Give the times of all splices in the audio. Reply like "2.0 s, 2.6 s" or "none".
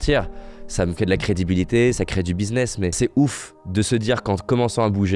none